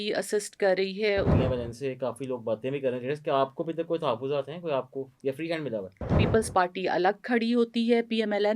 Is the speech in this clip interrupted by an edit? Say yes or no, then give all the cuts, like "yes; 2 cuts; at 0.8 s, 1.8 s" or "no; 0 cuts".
yes; 2 cuts; at 1.3 s, 6.2 s